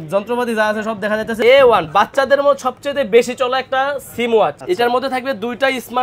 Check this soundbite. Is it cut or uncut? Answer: cut